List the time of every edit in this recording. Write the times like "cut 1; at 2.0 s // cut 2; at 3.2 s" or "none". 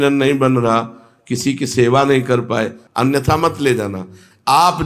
cut 1; at 2.8 s